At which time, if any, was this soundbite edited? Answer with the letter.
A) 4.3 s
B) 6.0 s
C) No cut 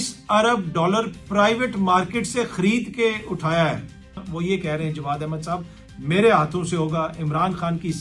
A